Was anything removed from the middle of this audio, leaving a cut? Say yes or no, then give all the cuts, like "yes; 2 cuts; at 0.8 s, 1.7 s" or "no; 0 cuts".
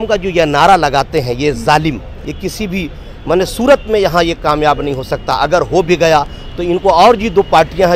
yes; 1 cut; at 2.1 s